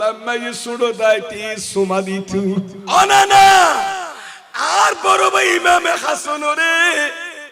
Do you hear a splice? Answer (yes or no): yes